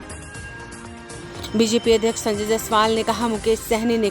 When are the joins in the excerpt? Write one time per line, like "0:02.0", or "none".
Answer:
0:01.0